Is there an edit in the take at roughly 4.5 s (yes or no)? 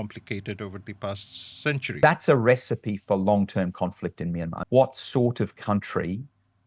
yes